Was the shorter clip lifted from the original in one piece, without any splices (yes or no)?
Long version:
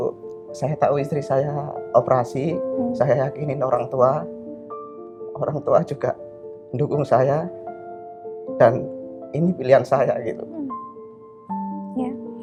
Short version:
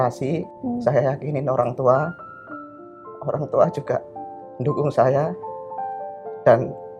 yes